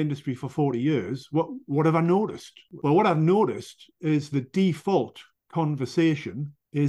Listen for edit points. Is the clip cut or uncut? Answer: uncut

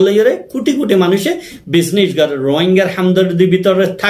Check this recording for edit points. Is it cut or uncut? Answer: uncut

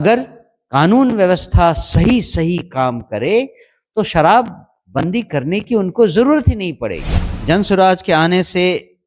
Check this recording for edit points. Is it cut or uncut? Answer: cut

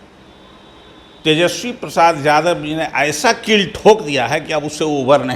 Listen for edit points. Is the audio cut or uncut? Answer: uncut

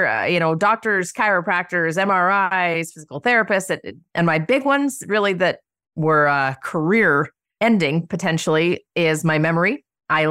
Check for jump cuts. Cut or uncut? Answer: cut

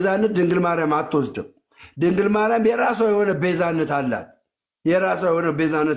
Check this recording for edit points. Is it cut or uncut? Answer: uncut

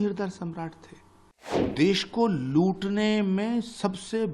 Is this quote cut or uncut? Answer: cut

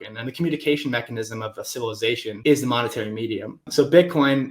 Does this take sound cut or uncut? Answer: cut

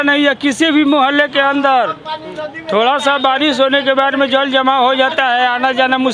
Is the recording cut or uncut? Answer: uncut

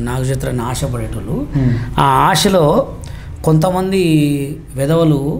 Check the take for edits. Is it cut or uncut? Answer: uncut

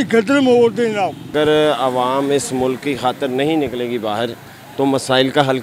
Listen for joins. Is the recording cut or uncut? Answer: cut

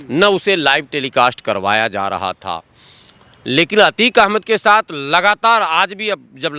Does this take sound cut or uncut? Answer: uncut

